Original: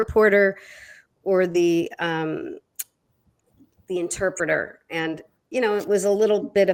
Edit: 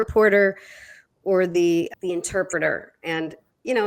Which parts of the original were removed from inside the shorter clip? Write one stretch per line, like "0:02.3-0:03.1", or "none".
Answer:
0:01.9-0:03.8